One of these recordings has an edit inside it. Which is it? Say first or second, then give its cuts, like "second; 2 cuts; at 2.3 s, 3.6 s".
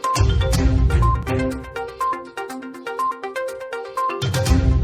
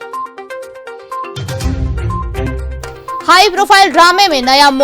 second; 1 cut; at 2.9 s